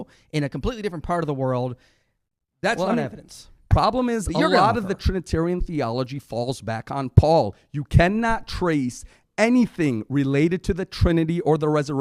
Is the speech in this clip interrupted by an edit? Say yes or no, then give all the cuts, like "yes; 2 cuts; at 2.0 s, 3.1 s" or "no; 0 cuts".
yes; 1 cut; at 3.7 s